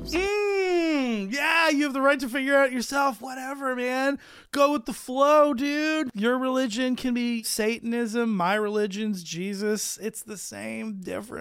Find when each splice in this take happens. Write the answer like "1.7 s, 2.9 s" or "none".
6.1 s, 7.4 s